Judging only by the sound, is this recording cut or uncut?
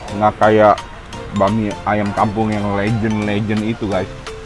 uncut